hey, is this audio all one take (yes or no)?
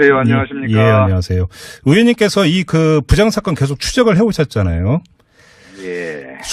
no